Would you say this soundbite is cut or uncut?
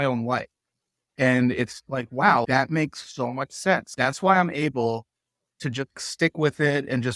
cut